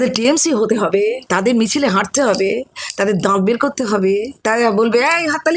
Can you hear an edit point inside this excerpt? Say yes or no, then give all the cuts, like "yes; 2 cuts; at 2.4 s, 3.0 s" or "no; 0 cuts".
no; 0 cuts